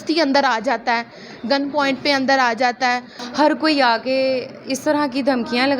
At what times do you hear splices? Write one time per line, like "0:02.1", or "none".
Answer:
0:03.1